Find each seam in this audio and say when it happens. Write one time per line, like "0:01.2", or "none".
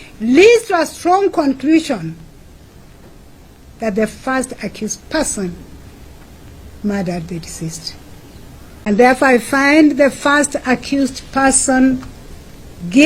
0:08.9